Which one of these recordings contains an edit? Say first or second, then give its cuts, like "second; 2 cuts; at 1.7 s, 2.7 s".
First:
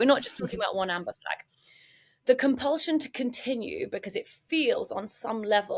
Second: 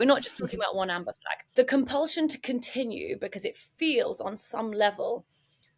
second; 1 cut; at 1.3 s